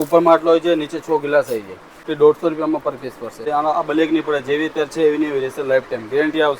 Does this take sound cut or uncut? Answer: cut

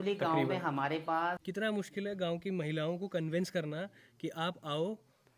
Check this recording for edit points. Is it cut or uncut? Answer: cut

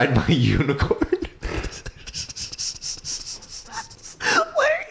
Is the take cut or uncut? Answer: cut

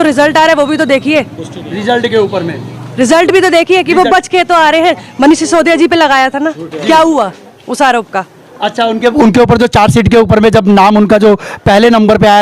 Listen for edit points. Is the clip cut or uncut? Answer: uncut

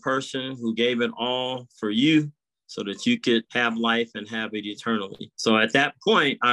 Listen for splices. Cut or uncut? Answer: cut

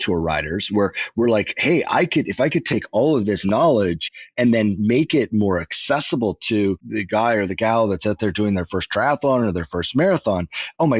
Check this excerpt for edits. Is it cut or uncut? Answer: uncut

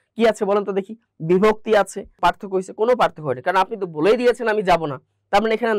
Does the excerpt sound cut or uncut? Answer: cut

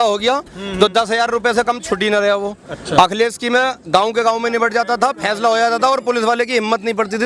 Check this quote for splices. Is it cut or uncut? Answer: uncut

